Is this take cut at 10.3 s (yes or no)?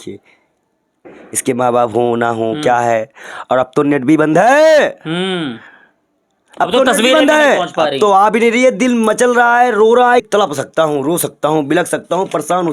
yes